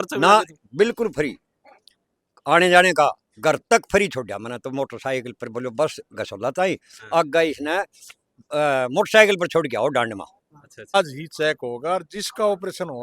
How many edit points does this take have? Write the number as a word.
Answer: one